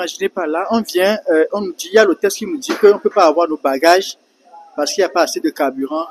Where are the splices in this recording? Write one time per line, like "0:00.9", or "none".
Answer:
none